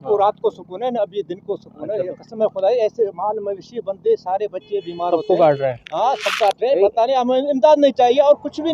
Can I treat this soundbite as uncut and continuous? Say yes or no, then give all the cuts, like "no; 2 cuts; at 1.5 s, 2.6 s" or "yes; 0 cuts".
yes; 0 cuts